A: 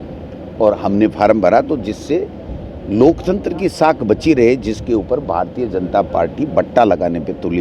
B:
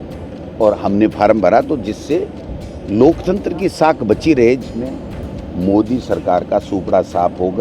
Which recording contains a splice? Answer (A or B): B